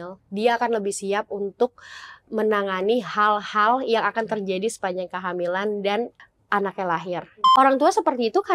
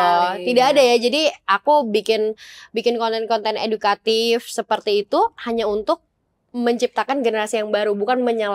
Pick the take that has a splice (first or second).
first